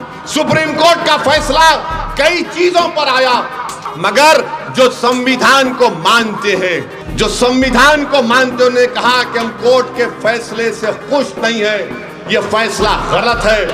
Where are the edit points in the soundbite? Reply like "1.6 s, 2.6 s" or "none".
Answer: 3.8 s, 7.0 s